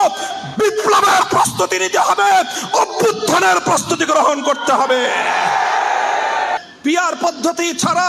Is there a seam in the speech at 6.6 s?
yes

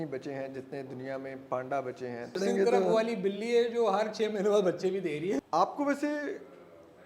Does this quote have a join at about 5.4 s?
yes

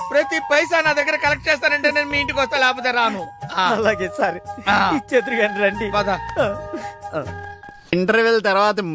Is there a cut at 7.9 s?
yes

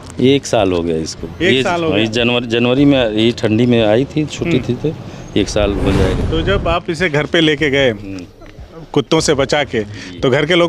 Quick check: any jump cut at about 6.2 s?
yes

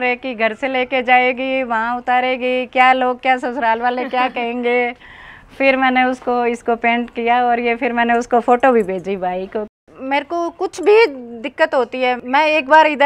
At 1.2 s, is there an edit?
no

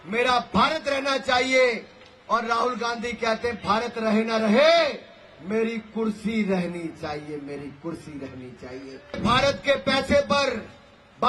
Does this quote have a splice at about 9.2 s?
yes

